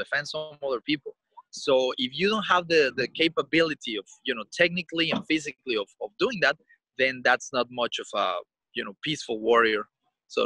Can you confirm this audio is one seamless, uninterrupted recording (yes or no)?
yes